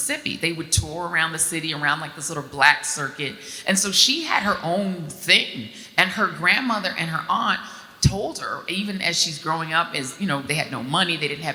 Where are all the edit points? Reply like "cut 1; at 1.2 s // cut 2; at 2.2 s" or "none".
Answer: none

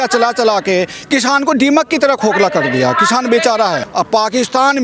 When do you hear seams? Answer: cut 1; at 3.8 s

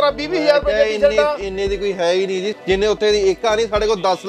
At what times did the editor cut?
cut 1; at 2.5 s

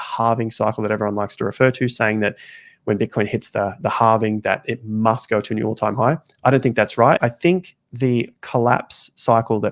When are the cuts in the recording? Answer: none

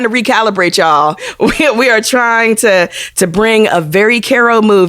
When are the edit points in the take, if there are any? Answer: cut 1; at 1.3 s

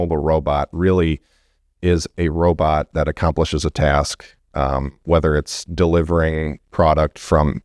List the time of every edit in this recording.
none

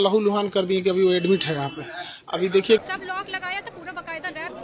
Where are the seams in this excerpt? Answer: cut 1; at 2.8 s

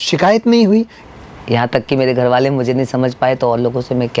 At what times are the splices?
cut 1; at 1.0 s

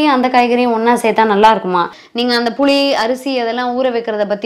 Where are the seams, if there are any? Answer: cut 1; at 2.0 s

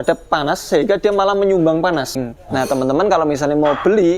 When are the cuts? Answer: cut 1; at 2.2 s

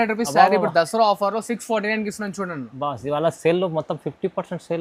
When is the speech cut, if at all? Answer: none

